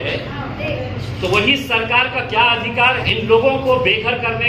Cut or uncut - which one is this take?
cut